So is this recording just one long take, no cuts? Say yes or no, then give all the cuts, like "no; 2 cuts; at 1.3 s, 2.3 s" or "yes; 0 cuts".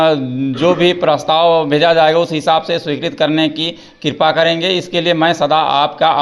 yes; 0 cuts